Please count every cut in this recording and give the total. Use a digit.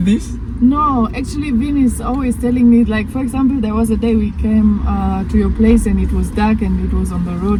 0